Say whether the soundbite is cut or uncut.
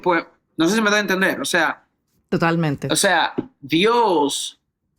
uncut